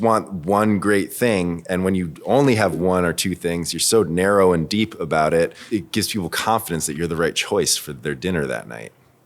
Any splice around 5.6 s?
yes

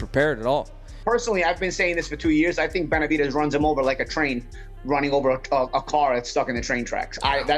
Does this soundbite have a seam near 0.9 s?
yes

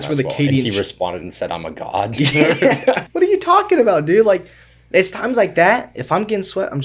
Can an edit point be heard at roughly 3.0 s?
yes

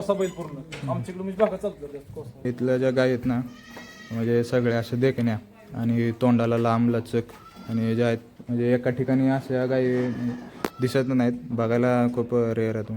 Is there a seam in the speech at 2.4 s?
yes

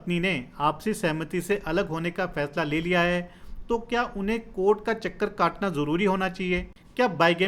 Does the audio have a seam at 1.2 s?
no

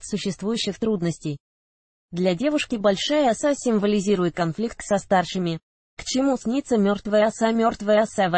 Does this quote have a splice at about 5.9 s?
yes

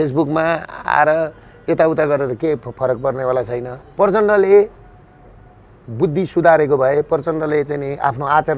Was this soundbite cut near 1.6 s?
no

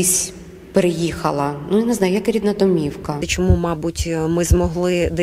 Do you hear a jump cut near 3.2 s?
yes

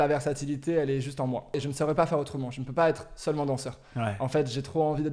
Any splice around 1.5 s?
yes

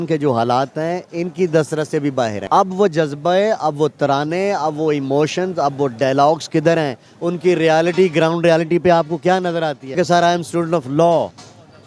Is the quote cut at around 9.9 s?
yes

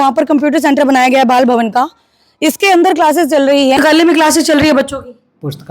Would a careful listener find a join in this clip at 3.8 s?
yes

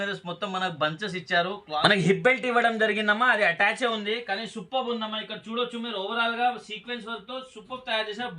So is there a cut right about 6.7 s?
no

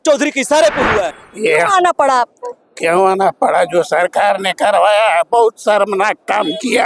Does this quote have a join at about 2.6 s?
no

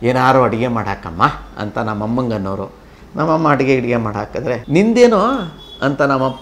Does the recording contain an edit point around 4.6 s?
yes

